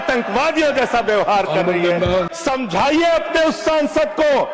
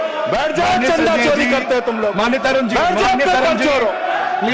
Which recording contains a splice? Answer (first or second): first